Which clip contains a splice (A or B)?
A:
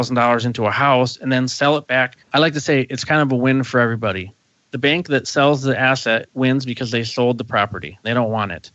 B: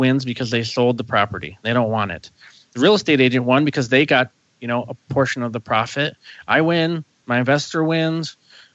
A